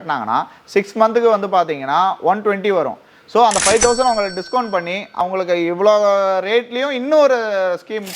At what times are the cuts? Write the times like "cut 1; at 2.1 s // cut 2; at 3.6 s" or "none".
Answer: cut 1; at 5.2 s